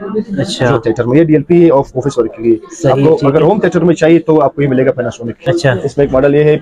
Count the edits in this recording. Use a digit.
1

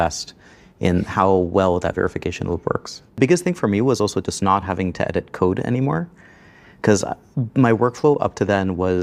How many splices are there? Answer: 1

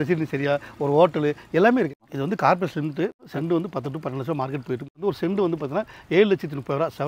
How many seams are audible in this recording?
3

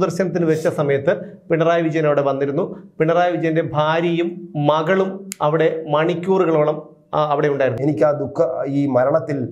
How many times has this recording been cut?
1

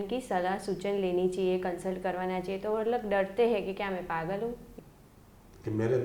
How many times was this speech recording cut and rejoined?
1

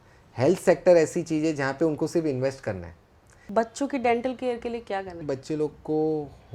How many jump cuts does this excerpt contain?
2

